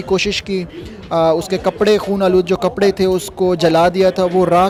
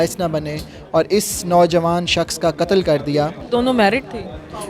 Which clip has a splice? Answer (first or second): second